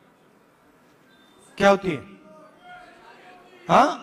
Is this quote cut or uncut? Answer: uncut